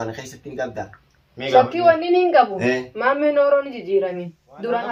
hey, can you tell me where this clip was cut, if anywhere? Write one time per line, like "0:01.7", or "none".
none